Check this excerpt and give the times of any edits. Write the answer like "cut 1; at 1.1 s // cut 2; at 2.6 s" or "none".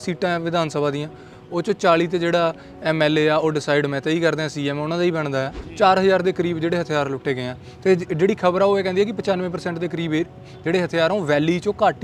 cut 1; at 5.6 s